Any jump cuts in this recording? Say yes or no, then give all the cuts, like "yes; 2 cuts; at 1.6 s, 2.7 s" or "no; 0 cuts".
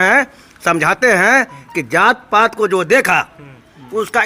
no; 0 cuts